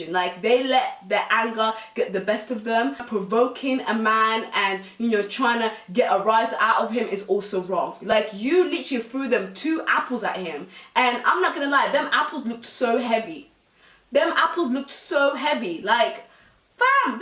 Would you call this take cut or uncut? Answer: uncut